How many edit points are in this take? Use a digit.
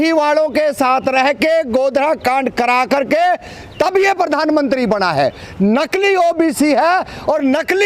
0